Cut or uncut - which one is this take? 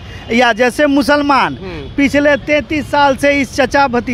uncut